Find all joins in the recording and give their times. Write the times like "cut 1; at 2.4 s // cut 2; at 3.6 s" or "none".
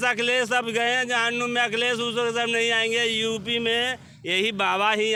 none